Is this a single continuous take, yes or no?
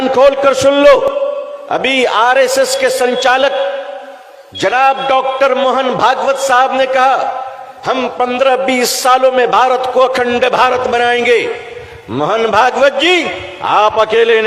no